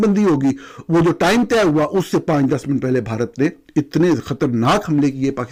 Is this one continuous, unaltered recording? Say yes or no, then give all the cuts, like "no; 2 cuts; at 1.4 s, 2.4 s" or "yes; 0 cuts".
yes; 0 cuts